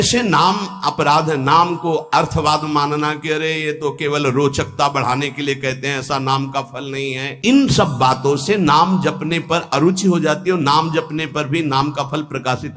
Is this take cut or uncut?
uncut